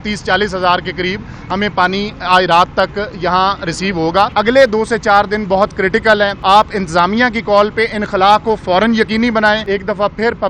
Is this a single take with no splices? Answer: no; 3 cuts; at 4.3 s, 6.4 s, 9.6 s

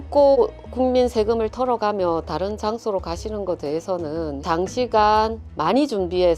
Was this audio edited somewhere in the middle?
yes; 1 cut; at 4.4 s

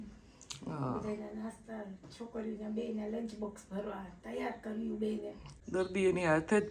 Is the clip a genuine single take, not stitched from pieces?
no; 1 cut; at 5.4 s

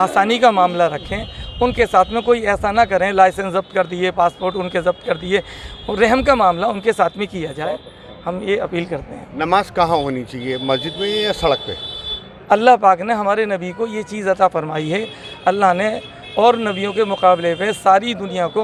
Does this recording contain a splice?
no; 0 cuts

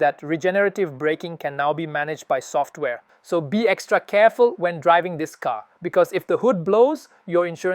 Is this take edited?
yes; 1 cut; at 3.1 s

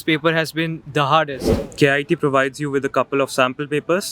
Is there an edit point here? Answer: yes; 1 cut; at 1.6 s

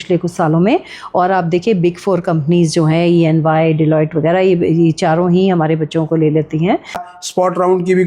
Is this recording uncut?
no; 1 cut; at 7.0 s

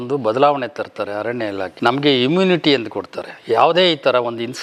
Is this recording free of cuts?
yes; 0 cuts

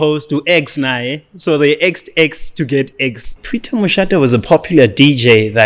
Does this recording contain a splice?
yes; 1 cut; at 3.4 s

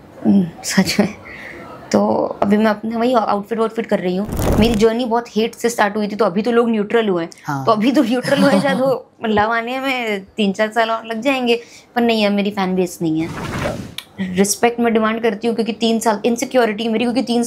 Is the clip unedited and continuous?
no; 2 cuts; at 4.3 s, 13.7 s

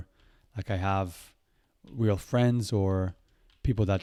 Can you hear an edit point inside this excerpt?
no; 0 cuts

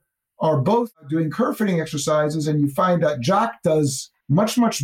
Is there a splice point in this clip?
no; 0 cuts

